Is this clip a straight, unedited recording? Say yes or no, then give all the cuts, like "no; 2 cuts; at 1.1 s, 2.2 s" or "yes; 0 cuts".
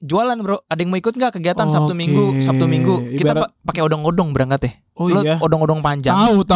yes; 0 cuts